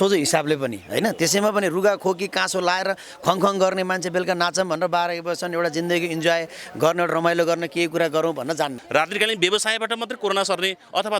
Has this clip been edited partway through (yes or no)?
yes